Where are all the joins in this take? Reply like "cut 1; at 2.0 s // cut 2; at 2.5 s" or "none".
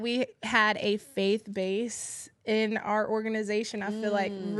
none